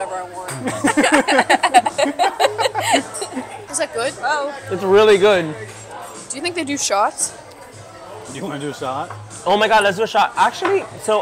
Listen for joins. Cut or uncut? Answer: uncut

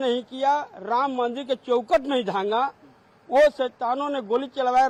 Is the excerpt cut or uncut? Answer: uncut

